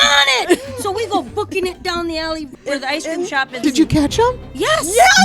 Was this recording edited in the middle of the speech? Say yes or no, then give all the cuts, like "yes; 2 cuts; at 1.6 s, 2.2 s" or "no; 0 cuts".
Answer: yes; 2 cuts; at 2.5 s, 3.6 s